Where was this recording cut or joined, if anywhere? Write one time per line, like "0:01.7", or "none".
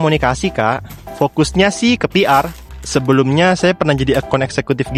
none